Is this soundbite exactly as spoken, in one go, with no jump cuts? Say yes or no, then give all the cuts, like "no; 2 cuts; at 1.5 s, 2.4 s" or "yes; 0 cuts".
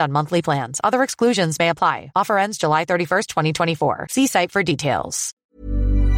no; 1 cut; at 5.2 s